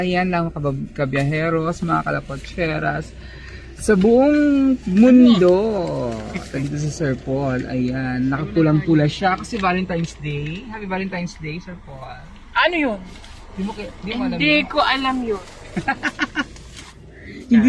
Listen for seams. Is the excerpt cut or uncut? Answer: uncut